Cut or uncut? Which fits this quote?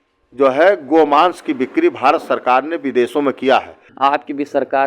cut